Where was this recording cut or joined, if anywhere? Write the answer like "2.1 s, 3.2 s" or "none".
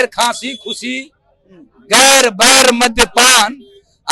none